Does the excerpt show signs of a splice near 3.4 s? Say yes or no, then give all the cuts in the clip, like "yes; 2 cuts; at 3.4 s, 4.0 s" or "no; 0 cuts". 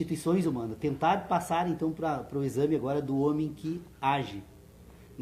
yes; 1 cut; at 3.4 s